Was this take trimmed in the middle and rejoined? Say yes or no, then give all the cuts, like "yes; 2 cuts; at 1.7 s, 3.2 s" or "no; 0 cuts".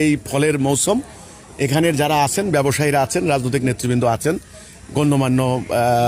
no; 0 cuts